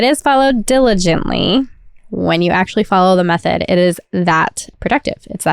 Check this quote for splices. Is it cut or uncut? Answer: cut